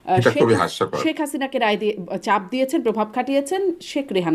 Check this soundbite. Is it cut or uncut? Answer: uncut